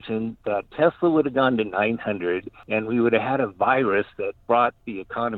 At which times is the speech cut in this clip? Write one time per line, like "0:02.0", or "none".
0:02.5
0:04.4